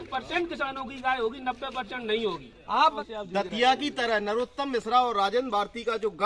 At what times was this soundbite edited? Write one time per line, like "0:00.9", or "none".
0:02.8